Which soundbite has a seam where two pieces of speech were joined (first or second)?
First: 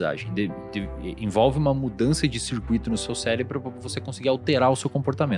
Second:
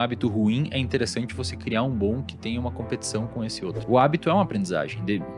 second